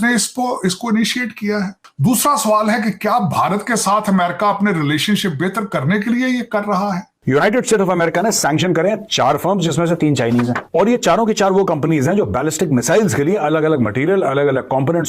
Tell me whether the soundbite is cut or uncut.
cut